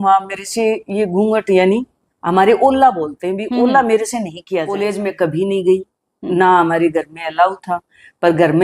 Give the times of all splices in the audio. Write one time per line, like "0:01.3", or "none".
0:04.7